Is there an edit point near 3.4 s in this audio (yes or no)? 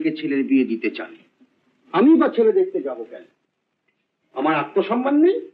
no